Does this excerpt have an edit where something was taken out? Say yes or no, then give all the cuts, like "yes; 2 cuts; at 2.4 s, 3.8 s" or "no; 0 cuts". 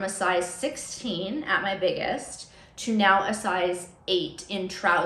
no; 0 cuts